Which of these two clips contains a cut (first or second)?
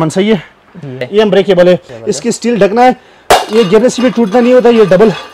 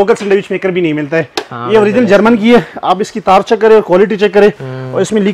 first